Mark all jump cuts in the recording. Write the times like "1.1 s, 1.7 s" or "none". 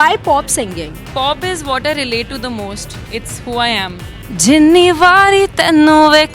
1.0 s, 4.1 s